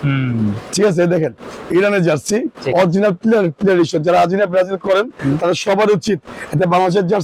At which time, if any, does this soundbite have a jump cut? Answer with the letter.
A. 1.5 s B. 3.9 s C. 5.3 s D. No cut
D